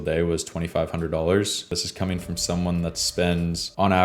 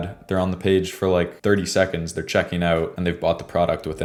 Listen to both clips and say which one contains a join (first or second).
first